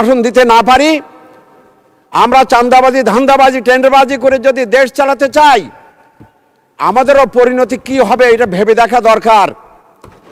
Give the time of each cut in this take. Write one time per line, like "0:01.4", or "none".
none